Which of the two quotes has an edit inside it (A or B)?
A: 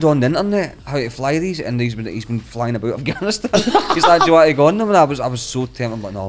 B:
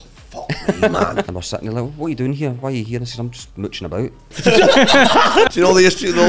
B